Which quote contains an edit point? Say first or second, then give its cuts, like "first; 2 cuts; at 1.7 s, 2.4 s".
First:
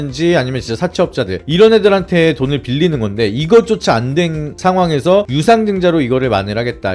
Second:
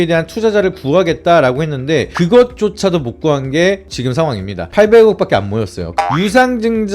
second; 2 cuts; at 2.1 s, 5.9 s